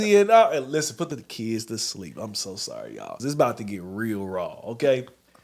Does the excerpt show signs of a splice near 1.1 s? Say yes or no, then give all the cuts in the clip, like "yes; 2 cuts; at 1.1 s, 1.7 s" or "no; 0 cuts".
yes; 2 cuts; at 1.1 s, 3.1 s